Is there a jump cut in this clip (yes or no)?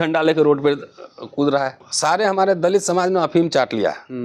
yes